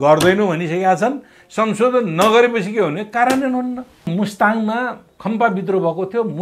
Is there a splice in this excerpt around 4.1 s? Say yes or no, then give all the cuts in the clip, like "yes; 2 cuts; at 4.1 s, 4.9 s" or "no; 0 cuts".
yes; 1 cut; at 4.1 s